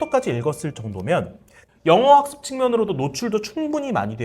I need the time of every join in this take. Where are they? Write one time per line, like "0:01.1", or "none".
0:01.7